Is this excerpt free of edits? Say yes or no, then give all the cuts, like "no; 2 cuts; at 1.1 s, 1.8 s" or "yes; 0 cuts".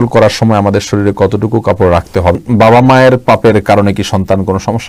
no; 1 cut; at 2.4 s